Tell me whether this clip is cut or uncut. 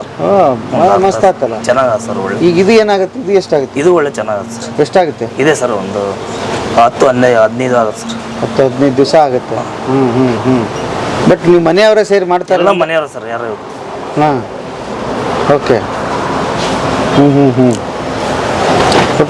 uncut